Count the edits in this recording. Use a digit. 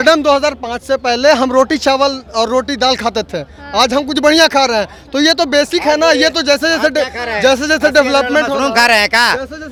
0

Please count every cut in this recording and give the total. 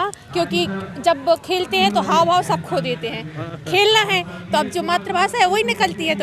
0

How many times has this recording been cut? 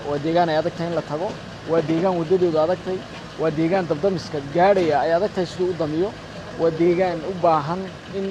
0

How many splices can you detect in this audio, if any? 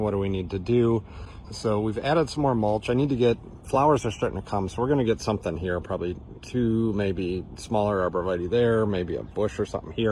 0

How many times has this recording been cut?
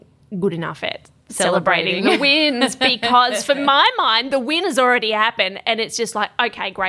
0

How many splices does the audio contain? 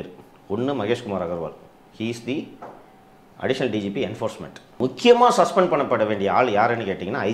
1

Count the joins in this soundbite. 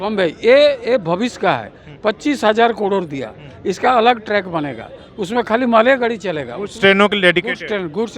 0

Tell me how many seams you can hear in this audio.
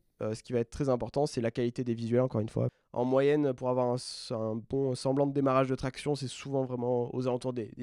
1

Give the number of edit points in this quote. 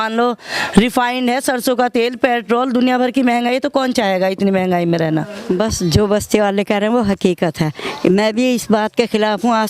1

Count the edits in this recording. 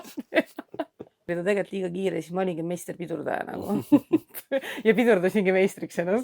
1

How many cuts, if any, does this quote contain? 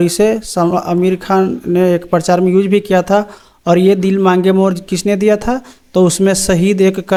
0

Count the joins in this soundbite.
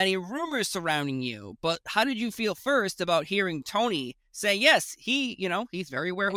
0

